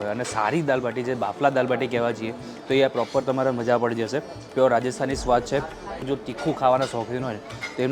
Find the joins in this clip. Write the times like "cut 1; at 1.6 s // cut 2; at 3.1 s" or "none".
cut 1; at 6.0 s